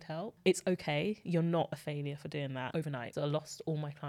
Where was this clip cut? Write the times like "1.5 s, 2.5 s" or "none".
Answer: 2.9 s